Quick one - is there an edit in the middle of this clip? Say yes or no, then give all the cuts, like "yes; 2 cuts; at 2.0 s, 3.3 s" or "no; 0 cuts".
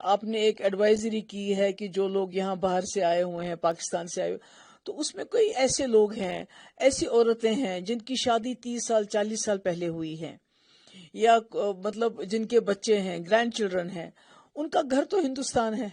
no; 0 cuts